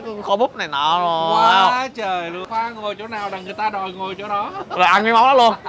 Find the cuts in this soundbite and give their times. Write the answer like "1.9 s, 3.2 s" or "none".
2.4 s